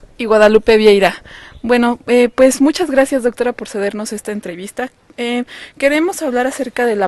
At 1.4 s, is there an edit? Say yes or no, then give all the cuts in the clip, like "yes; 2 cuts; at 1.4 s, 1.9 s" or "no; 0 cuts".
no; 1 cut; at 4.1 s